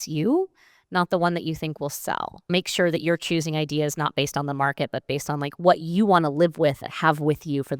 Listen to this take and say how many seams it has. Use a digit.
2